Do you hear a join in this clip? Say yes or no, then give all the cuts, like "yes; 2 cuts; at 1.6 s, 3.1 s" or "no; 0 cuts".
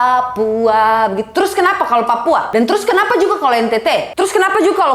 yes; 2 cuts; at 2.5 s, 4.1 s